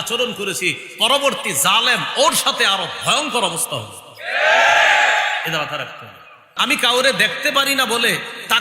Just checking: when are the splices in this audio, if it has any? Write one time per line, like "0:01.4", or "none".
0:06.4